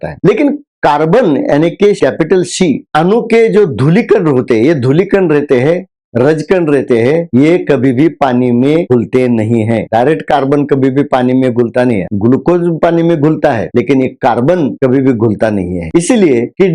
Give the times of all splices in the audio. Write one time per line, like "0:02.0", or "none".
0:12.1